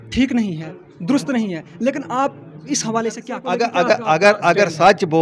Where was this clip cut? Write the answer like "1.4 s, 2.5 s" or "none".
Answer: 3.3 s